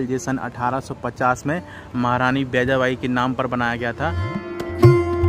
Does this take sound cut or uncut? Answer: cut